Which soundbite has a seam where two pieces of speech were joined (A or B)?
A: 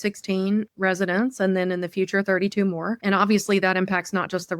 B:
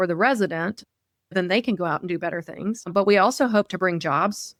A